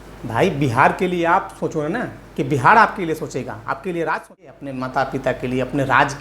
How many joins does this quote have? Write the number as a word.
one